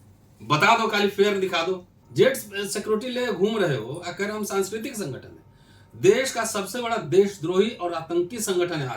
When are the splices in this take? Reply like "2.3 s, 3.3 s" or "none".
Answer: 2.0 s